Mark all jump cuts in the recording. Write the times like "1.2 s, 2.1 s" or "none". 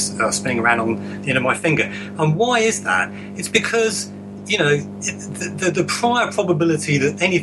none